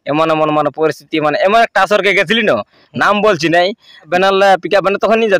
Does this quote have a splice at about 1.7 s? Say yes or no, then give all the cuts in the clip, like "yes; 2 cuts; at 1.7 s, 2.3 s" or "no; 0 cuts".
no; 1 cut; at 4.1 s